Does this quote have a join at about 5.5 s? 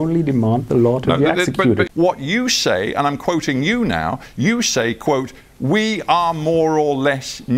no; 1 cut; at 1.9 s

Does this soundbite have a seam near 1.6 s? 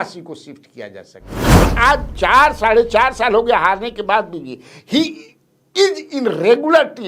yes; 1 cut; at 1.6 s

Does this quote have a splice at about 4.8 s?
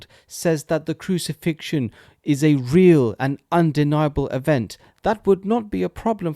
yes; 1 cut; at 4.8 s

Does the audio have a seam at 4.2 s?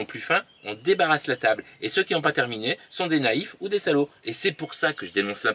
yes; 1 cut; at 4.2 s

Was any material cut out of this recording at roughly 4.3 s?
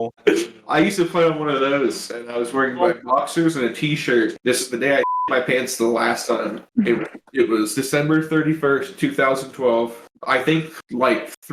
yes; 1 cut; at 4.3 s

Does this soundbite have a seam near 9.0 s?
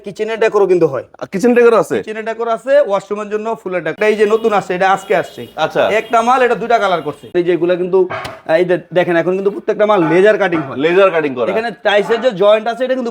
no; 2 cuts; at 3.9 s, 7.3 s

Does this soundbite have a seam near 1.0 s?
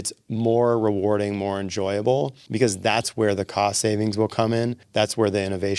no; 2 cuts; at 2.4 s, 4.8 s

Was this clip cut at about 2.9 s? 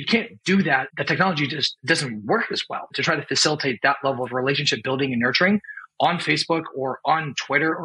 yes; 3 cuts; at 0.9 s, 1.7 s, 2.9 s

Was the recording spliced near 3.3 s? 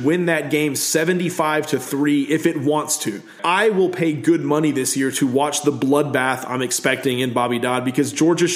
yes; 1 cut; at 3.3 s

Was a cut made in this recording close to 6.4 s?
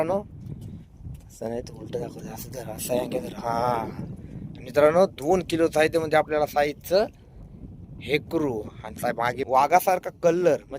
no; 1 cut; at 9.4 s

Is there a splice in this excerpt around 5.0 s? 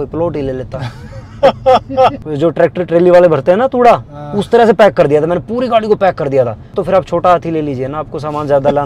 no; 2 cuts; at 2.2 s, 6.8 s

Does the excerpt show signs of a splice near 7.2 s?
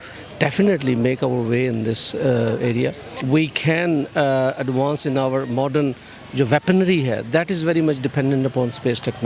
no; 1 cut; at 3.1 s

